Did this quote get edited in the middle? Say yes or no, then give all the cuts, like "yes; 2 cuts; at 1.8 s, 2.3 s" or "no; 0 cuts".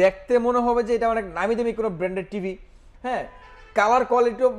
no; 0 cuts